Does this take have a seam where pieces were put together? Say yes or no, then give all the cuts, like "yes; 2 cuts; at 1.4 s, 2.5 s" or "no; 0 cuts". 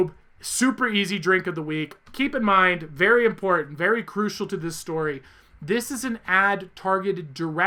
no; 0 cuts